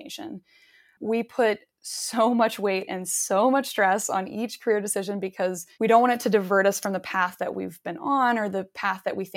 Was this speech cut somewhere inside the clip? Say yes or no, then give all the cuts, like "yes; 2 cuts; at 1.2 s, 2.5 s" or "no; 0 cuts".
yes; 2 cuts; at 0.9 s, 5.6 s